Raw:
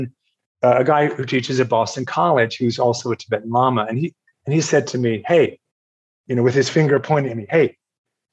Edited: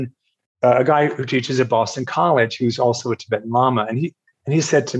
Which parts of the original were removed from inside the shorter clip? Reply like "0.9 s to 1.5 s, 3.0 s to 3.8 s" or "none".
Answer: none

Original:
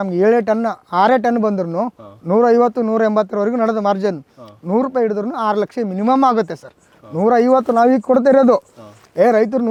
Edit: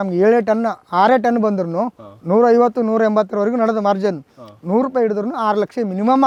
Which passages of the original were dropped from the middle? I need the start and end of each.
none

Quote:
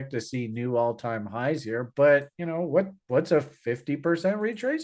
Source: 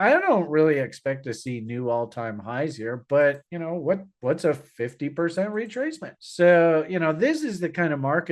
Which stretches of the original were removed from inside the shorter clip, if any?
none

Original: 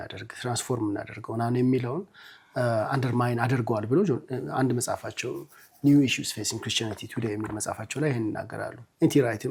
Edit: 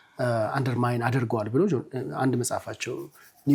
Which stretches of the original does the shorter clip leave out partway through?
none

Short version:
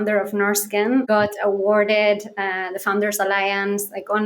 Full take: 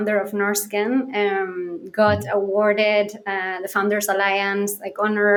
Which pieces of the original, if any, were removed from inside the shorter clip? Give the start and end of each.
1.1 s to 1.9 s

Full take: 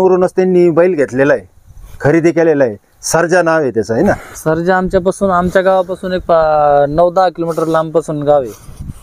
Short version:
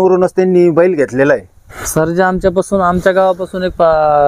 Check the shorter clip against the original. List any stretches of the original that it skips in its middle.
1.8 s to 4.3 s

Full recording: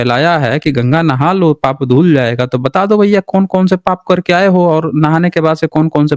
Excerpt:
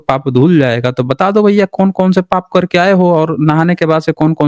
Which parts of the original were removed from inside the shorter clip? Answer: none

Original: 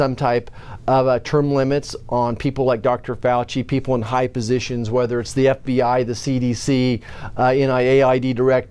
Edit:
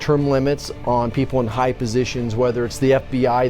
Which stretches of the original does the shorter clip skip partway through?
2.4 s to 3.7 s

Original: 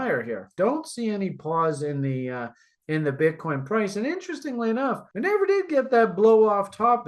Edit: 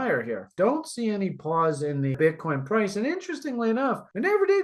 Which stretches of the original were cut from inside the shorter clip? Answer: 2.1 s to 3.1 s

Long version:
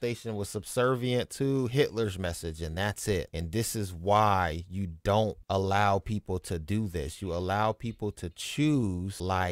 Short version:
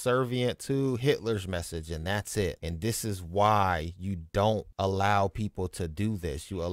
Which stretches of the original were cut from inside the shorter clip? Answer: none

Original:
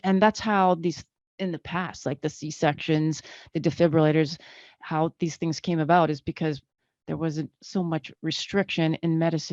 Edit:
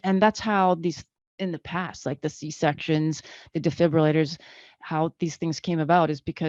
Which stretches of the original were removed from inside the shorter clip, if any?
none

